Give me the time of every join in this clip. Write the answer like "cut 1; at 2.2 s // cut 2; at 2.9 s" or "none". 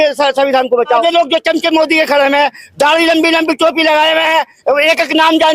cut 1; at 1.0 s